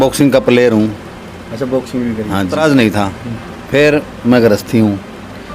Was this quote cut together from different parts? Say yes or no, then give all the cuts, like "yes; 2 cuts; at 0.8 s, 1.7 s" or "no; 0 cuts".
yes; 1 cut; at 2.6 s